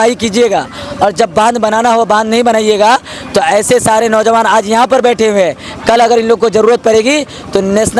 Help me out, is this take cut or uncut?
uncut